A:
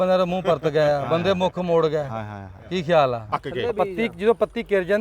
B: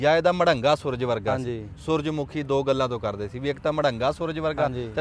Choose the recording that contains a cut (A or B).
A